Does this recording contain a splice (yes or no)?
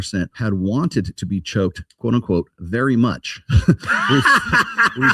no